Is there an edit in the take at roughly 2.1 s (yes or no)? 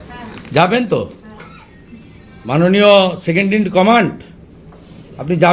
no